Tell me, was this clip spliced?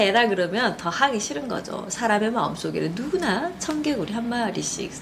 no; 0 cuts

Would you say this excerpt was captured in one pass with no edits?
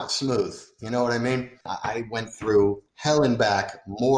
no; 2 cuts; at 1.7 s, 2.9 s

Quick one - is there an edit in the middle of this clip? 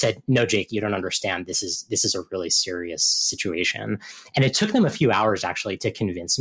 no; 0 cuts

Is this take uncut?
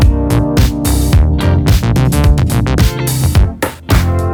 yes; 0 cuts

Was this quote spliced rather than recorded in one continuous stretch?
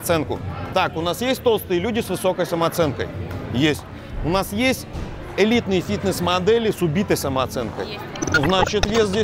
no; 0 cuts

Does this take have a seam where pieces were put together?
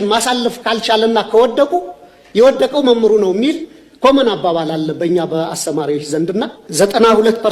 yes; 1 cut; at 6.6 s

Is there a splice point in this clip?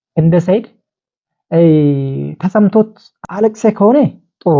yes; 1 cut; at 3.2 s

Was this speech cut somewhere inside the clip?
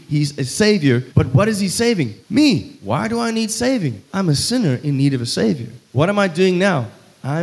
yes; 5 cuts; at 1.1 s, 2.2 s, 2.7 s, 4.0 s, 5.8 s

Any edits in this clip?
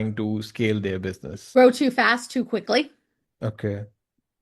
yes; 1 cut; at 1.3 s

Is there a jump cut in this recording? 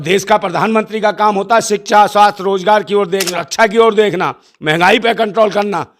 yes; 1 cut; at 3.4 s

